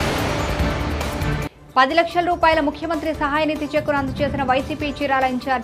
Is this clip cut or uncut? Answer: cut